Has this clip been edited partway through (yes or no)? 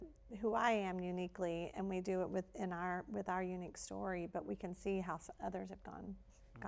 no